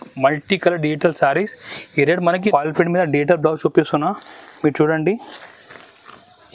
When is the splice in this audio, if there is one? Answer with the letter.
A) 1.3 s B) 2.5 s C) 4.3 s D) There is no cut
B